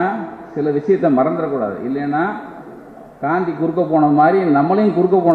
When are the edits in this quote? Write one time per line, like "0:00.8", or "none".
none